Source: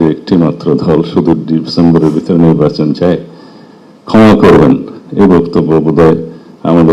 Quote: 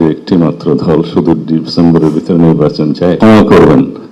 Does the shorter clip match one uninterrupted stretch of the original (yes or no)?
no